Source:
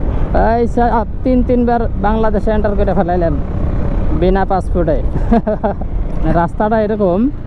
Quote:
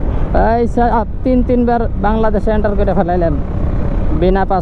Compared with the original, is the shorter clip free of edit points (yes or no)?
yes